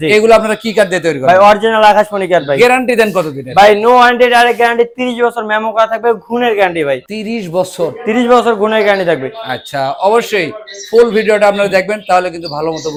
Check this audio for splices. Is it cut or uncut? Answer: uncut